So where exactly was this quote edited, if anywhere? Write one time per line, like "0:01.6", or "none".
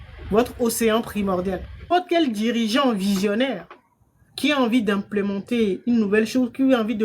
0:01.9